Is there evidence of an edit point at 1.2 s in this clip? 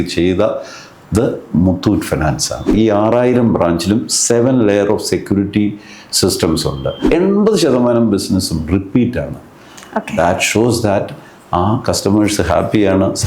no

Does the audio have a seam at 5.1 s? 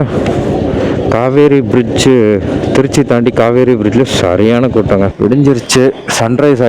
yes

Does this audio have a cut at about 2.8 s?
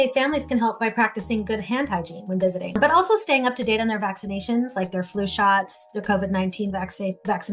yes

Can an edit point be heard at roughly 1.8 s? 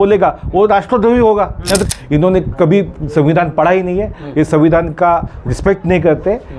yes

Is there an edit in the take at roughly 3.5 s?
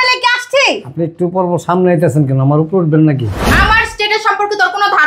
yes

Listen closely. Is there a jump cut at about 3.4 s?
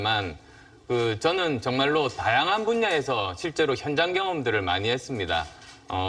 yes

